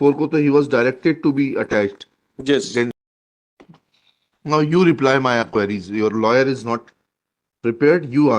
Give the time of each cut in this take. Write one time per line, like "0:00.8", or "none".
0:02.9

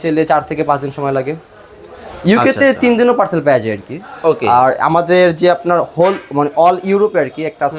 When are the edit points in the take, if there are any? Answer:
none

